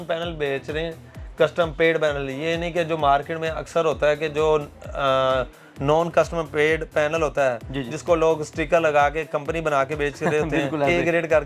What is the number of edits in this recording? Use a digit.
0